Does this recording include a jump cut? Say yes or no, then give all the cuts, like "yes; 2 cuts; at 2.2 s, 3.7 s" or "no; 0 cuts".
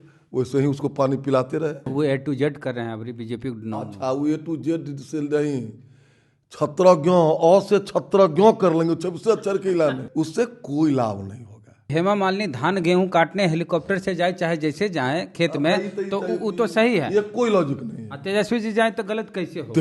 yes; 3 cuts; at 1.9 s, 10.0 s, 11.9 s